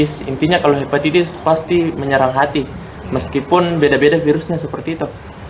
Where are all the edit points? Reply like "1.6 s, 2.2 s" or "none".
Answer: none